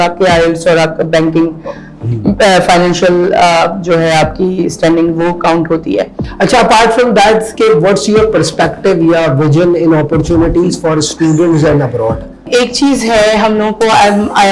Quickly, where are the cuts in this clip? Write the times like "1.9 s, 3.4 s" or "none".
6.2 s, 12.5 s